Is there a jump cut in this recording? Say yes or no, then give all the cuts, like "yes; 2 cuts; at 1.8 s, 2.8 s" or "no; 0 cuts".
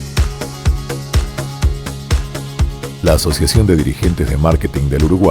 yes; 1 cut; at 2.6 s